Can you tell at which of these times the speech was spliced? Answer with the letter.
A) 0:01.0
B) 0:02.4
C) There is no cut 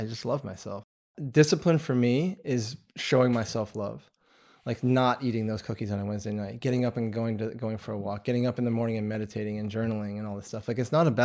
A